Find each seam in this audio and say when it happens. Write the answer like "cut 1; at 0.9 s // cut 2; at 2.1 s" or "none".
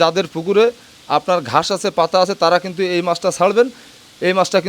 none